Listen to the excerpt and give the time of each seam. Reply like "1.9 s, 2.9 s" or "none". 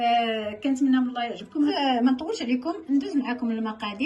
1.8 s